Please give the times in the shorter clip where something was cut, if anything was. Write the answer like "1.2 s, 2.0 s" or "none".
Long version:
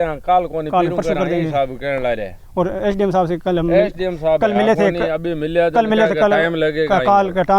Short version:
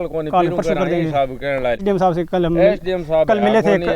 1.8 s